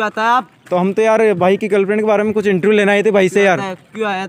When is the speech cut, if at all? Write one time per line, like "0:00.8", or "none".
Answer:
none